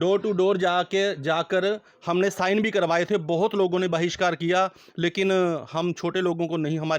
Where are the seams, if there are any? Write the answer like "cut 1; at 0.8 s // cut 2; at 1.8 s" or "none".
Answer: none